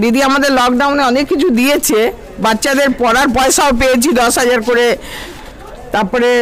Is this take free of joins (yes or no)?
yes